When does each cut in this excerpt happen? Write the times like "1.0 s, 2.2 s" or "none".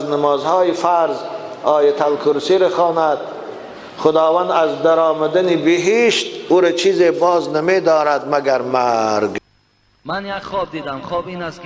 9.3 s